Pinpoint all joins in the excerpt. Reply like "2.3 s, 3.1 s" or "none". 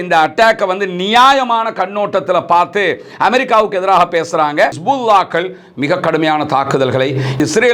4.8 s